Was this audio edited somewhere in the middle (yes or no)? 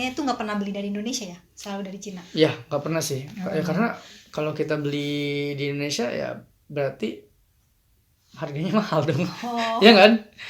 no